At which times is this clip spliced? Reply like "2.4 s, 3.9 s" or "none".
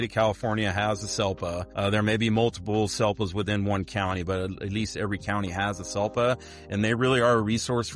1.7 s